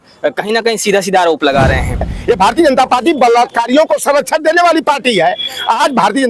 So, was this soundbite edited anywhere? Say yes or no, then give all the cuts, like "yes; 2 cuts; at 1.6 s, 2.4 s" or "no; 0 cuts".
yes; 1 cut; at 2.1 s